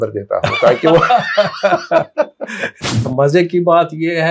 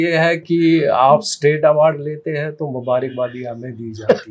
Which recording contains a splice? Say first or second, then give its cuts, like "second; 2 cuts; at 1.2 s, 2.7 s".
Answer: first; 1 cut; at 3.0 s